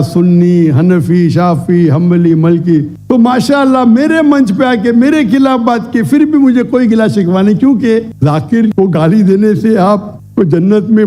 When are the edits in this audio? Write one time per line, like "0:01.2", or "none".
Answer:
0:02.9
0:08.1